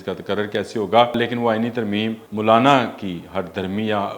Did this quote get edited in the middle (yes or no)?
yes